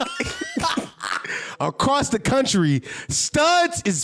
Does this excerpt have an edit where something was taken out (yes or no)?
no